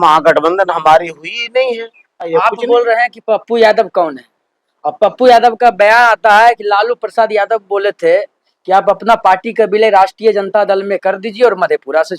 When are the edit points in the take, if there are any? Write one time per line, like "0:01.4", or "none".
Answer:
0:02.3

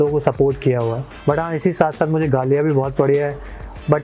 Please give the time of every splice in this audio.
0:01.1

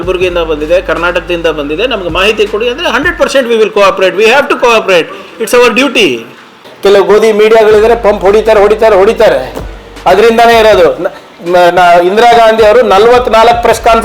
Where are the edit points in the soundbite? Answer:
0:06.7

